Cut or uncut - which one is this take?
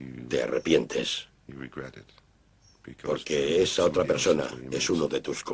uncut